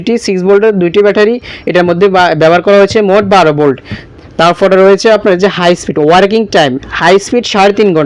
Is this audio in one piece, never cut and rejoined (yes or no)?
yes